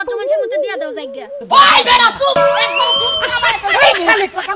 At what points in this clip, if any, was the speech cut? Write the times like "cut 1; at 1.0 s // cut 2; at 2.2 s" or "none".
cut 1; at 1.1 s